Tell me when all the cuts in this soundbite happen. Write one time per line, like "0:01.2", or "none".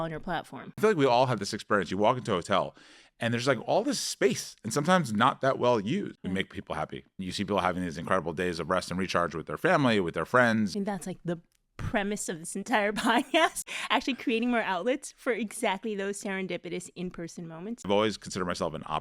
0:00.8
0:06.1
0:10.7
0:13.6
0:17.9